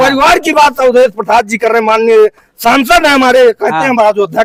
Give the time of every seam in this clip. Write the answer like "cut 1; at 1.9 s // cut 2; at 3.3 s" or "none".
none